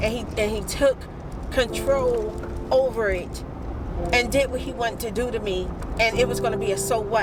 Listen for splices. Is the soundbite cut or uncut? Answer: uncut